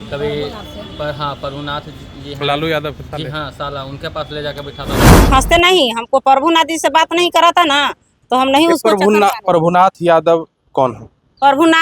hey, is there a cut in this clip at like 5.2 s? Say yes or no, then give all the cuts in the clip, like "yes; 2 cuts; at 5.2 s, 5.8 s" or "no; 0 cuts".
yes; 1 cut; at 5.2 s